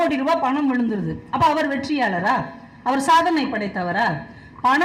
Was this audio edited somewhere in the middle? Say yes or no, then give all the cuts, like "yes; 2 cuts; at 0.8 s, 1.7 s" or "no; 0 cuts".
no; 0 cuts